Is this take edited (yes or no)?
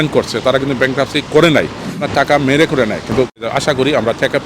yes